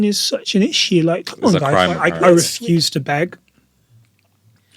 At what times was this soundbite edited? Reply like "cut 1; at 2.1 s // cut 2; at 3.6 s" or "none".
cut 1; at 2.1 s